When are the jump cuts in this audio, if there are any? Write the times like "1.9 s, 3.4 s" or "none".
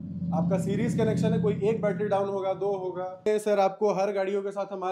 3.3 s

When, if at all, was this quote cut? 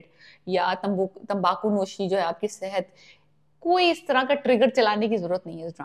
none

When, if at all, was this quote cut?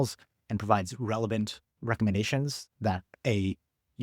1.7 s, 3.1 s

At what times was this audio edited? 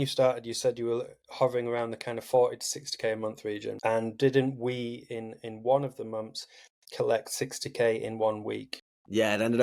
none

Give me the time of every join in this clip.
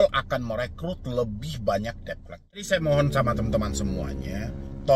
2.6 s

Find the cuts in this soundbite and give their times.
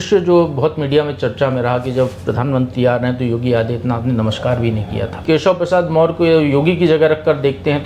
5.2 s

